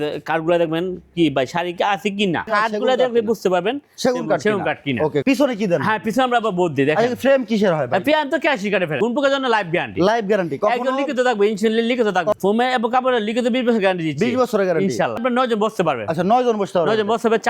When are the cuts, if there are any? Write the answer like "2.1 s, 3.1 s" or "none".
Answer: 2.5 s, 5.2 s, 9.0 s, 12.4 s, 15.2 s

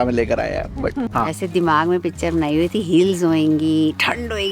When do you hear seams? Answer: 1.1 s

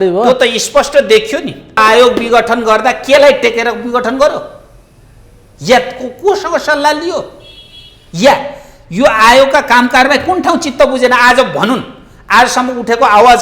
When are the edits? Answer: 1.8 s

